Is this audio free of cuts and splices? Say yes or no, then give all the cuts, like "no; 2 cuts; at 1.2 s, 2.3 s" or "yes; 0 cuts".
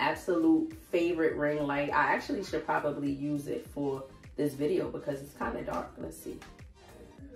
yes; 0 cuts